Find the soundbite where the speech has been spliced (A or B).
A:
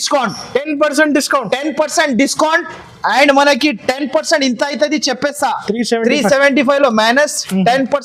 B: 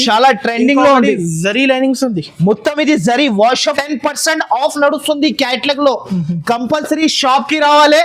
B